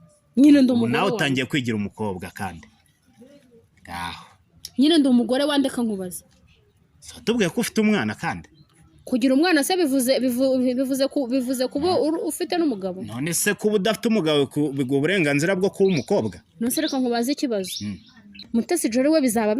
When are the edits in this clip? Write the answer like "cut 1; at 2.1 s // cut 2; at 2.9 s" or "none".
cut 1; at 18.3 s

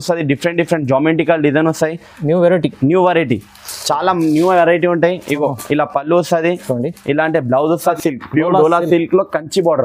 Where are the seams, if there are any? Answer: cut 1; at 7.9 s

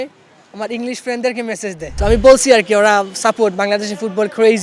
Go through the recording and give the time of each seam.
cut 1; at 1.9 s

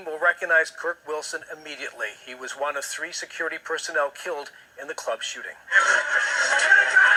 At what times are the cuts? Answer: none

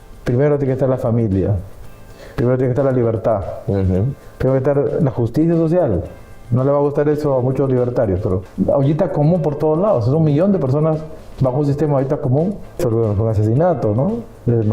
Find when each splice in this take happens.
cut 1; at 8.4 s // cut 2; at 12.8 s

